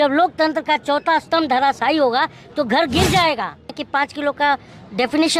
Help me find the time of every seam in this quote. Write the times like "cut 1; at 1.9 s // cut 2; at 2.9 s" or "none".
cut 1; at 3.8 s